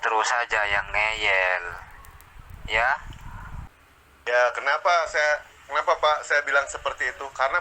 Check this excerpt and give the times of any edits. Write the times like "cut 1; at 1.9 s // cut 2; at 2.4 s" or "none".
cut 1; at 3.7 s